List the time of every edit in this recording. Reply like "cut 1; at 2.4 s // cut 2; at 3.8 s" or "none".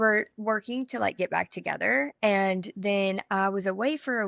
cut 1; at 2.1 s